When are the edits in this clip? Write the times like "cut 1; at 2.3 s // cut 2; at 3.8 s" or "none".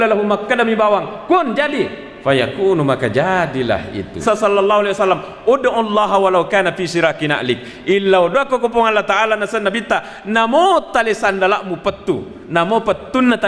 cut 1; at 4.1 s